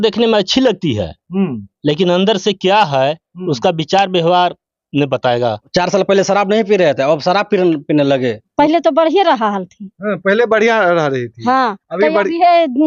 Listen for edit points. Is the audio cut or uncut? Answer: cut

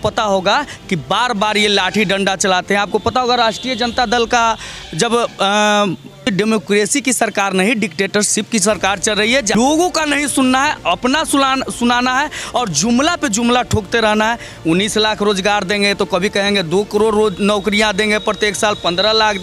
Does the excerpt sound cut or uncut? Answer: cut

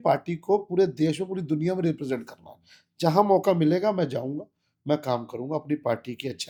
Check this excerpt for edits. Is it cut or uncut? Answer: uncut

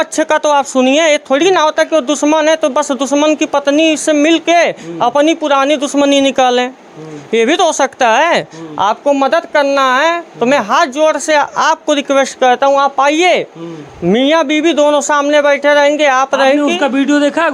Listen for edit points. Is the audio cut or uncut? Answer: uncut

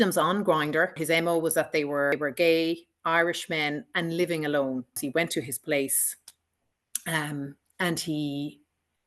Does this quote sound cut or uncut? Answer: cut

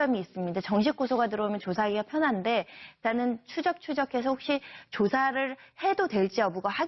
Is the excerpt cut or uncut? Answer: cut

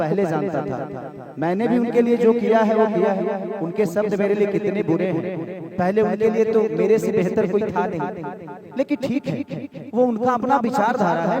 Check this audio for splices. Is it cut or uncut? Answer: uncut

